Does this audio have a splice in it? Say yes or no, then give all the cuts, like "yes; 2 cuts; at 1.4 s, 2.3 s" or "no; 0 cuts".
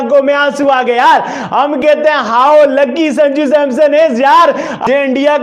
no; 0 cuts